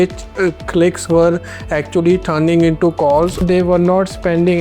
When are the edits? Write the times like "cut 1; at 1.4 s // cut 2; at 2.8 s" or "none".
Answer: cut 1; at 3.4 s

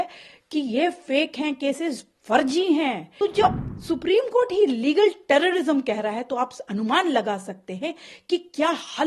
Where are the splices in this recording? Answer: cut 1; at 3.1 s

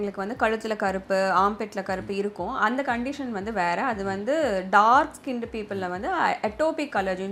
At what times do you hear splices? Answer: none

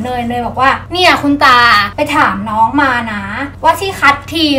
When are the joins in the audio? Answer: cut 1; at 1.8 s

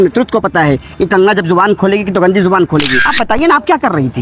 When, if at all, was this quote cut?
cut 1; at 3.0 s

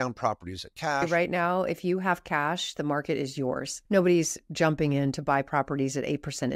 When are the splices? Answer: cut 1; at 1.1 s // cut 2; at 3.7 s

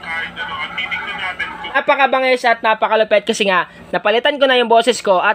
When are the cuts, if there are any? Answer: cut 1; at 1.8 s

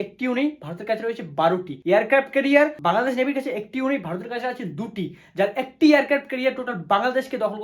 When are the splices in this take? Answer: cut 1; at 1.7 s // cut 2; at 2.8 s

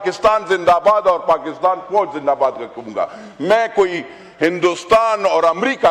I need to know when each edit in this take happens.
none

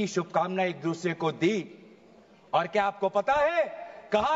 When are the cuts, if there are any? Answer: none

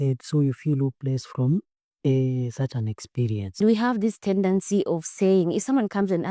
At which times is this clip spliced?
cut 1; at 3.6 s

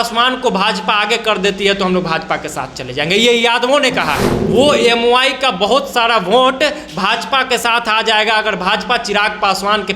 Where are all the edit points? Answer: cut 1; at 4.3 s

